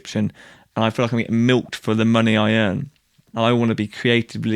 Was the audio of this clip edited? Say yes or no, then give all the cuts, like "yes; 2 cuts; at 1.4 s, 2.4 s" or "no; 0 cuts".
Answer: yes; 1 cut; at 3.3 s